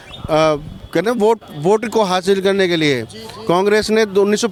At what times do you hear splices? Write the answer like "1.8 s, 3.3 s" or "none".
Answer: none